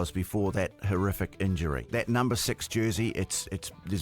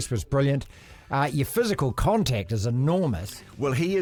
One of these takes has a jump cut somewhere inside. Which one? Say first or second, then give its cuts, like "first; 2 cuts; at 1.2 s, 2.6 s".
first; 1 cut; at 1.9 s